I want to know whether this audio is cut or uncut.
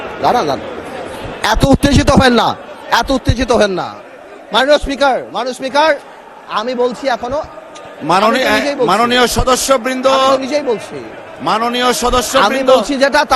uncut